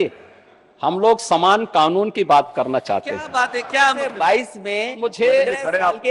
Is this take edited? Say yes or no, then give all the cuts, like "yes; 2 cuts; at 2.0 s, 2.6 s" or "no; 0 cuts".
yes; 1 cut; at 4.0 s